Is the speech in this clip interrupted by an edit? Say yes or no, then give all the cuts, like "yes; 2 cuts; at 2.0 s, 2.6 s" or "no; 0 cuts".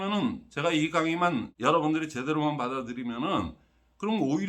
yes; 1 cut; at 1.5 s